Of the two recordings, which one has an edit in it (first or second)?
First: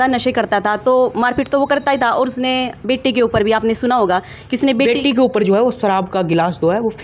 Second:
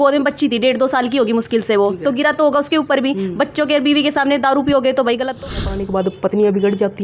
second